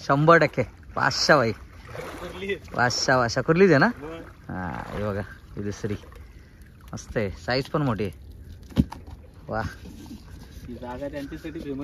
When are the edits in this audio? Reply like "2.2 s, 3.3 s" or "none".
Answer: none